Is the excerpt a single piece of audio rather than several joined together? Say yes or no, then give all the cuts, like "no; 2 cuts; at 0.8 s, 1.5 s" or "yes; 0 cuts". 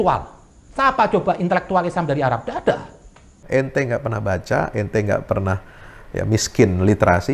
no; 1 cut; at 3.4 s